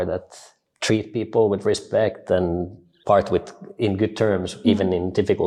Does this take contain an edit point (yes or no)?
no